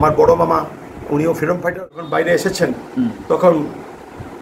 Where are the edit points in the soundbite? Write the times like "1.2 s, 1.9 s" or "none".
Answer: 2.0 s